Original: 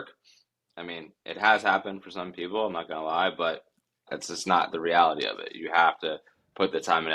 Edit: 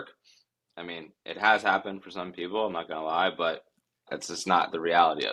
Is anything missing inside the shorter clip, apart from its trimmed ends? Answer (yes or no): no